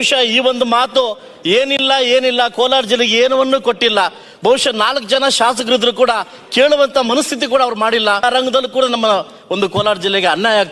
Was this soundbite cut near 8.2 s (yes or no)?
yes